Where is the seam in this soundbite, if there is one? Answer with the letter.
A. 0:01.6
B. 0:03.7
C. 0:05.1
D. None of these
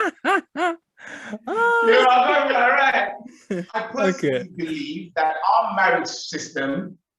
B